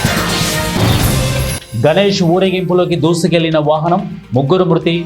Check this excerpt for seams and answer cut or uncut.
cut